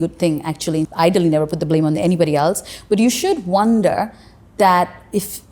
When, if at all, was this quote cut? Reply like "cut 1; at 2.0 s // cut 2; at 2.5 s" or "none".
cut 1; at 0.9 s